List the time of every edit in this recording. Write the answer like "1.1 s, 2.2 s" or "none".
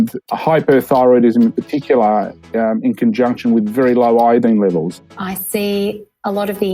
5.0 s